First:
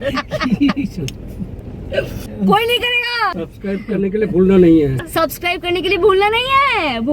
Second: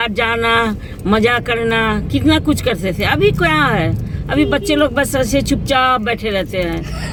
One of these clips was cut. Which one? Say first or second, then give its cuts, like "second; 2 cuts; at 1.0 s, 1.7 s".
first; 3 cuts; at 2.2 s, 3.3 s, 5.0 s